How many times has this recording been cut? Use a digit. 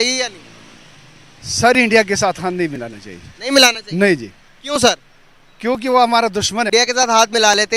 1